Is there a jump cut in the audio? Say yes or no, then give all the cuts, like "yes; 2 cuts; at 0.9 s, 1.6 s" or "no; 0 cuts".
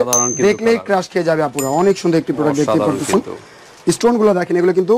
no; 0 cuts